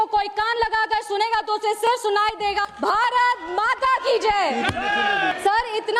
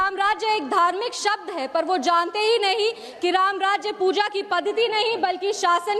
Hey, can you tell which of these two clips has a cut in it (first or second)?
first